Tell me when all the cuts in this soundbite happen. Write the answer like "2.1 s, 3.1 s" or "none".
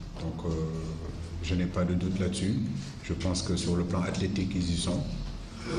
3.2 s